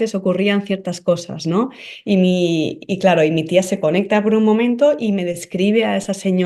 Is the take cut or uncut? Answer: uncut